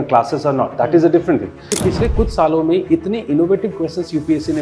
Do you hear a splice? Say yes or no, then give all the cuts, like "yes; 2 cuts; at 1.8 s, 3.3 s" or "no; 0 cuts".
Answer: yes; 1 cut; at 1.8 s